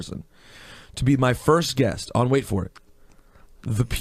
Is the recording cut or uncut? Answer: uncut